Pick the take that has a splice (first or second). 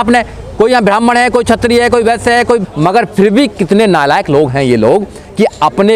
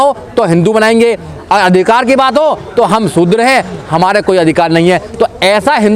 first